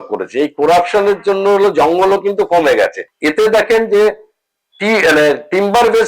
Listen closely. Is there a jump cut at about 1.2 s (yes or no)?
no